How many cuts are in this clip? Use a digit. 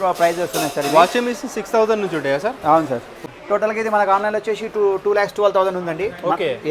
1